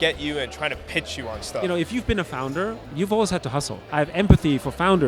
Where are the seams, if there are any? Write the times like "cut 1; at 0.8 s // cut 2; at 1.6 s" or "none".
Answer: cut 1; at 1.6 s // cut 2; at 2.9 s // cut 3; at 3.8 s